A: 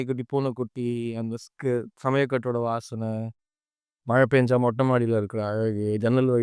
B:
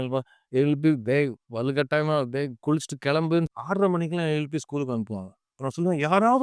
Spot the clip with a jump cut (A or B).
B